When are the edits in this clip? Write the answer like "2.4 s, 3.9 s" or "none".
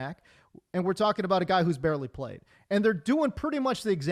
none

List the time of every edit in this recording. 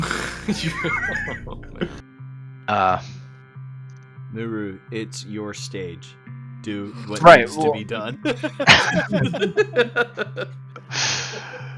2.0 s

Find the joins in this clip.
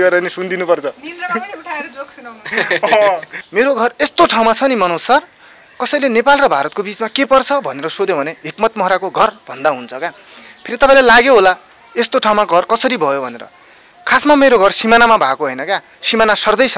3.4 s

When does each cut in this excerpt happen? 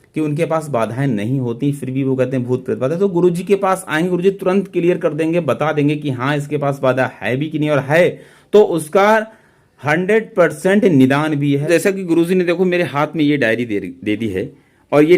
11.7 s

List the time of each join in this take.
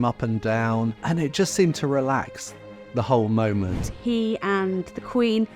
1.0 s, 3.9 s

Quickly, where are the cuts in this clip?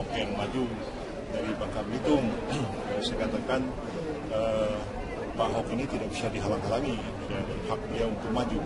6.0 s

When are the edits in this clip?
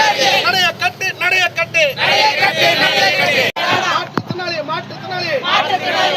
3.5 s

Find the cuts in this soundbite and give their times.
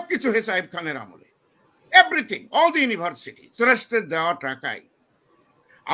3.5 s

